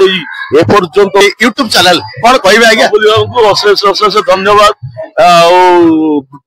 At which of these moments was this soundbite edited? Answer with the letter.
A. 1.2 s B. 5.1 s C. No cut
A